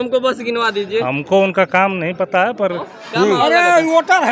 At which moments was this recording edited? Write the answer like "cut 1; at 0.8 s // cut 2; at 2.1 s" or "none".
cut 1; at 2.9 s